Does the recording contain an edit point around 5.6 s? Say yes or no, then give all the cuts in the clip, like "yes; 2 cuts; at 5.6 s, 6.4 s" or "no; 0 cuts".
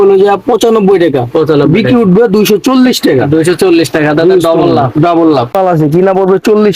yes; 1 cut; at 5.6 s